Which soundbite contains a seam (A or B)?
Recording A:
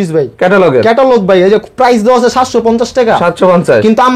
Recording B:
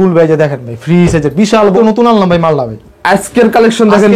B